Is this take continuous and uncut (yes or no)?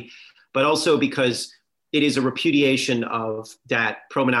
yes